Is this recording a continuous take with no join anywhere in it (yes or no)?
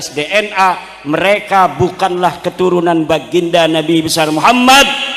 yes